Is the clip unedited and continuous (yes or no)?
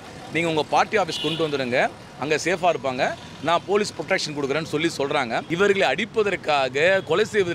no